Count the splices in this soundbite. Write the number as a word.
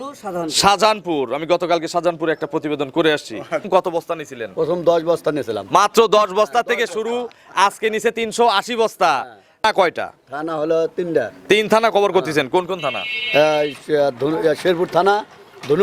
two